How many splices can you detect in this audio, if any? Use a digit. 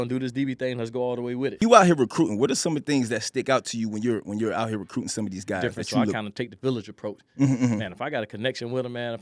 2